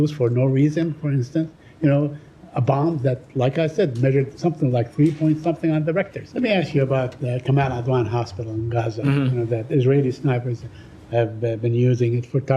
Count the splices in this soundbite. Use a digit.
1